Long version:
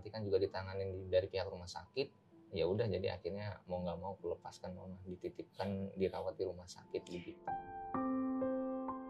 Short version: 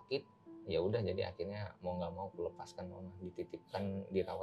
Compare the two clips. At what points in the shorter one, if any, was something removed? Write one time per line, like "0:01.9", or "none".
none

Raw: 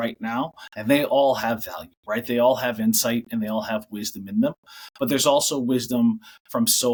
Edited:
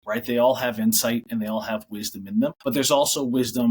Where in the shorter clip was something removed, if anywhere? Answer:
0:02.6

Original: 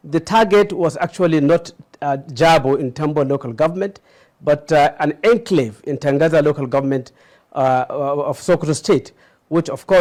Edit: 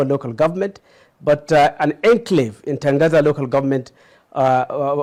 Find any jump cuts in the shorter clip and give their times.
none

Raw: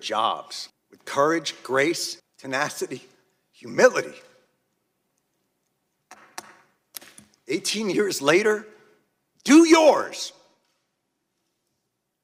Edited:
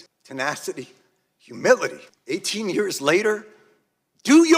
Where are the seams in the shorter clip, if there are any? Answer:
0:02.1

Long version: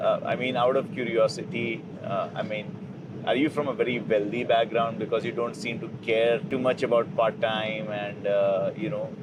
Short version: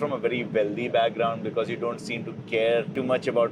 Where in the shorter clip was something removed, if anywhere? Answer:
none

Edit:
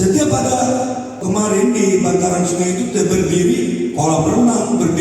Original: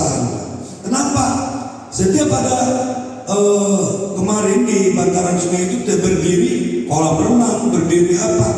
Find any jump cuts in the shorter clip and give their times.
0:01.2

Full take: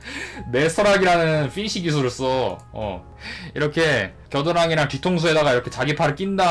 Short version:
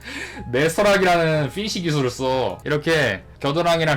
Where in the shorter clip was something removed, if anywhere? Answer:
0:02.6

